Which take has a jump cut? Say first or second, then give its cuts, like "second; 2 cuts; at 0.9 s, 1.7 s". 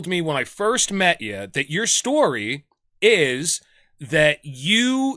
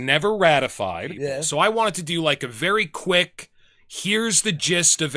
second; 1 cut; at 1.4 s